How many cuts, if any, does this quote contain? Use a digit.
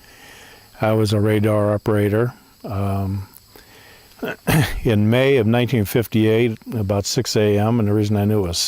1